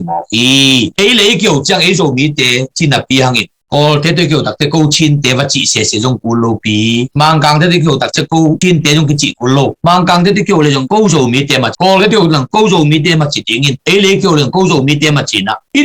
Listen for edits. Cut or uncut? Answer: cut